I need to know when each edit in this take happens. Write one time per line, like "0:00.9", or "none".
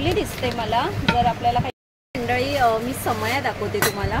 0:01.8